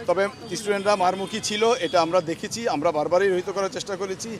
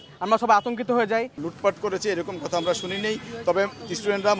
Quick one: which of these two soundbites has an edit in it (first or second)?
second